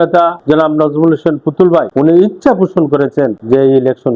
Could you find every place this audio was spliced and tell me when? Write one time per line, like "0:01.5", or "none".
none